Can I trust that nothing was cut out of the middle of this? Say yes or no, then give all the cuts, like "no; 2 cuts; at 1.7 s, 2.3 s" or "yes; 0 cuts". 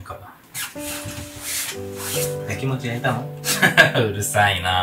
no; 1 cut; at 3.5 s